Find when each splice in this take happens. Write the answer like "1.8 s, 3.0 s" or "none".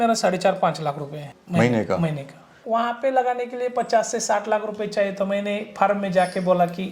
1.3 s, 2.6 s